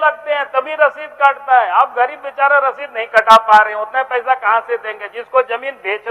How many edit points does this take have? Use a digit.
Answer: 0